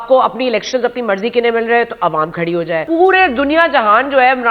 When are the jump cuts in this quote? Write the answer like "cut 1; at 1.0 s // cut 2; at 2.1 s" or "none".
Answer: cut 1; at 2.8 s